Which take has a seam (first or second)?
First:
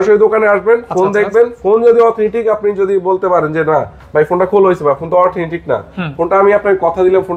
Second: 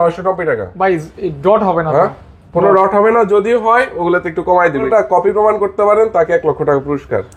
second